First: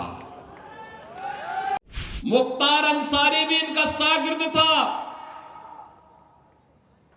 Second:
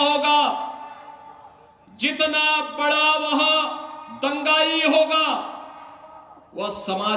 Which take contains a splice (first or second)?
first